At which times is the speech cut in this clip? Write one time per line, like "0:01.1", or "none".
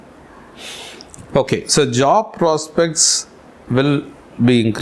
none